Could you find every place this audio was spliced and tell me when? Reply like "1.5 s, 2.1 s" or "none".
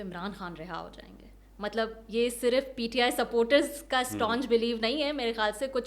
none